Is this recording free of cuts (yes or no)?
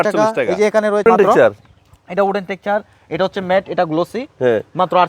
no